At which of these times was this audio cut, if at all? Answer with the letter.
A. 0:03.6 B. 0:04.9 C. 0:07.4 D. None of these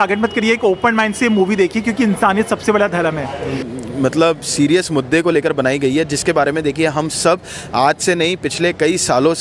A